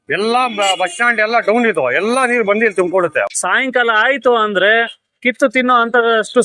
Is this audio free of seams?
no; 1 cut; at 3.3 s

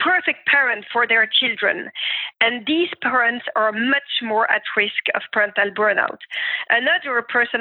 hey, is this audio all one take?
yes; 0 cuts

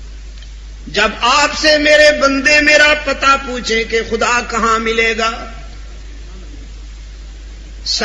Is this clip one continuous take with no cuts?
yes; 0 cuts

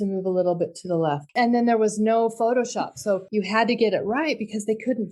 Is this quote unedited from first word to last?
no; 2 cuts; at 1.3 s, 3.3 s

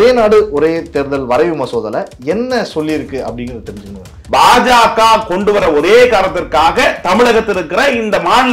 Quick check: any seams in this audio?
yes; 1 cut; at 4.1 s

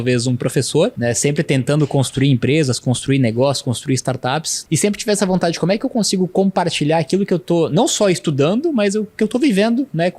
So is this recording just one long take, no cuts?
no; 2 cuts; at 1.0 s, 4.5 s

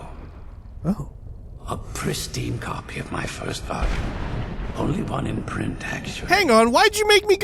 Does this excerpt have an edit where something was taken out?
yes; 1 cut; at 6.3 s

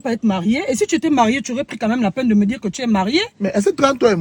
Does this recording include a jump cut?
no; 0 cuts

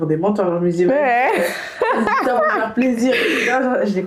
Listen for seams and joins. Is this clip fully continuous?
yes; 0 cuts

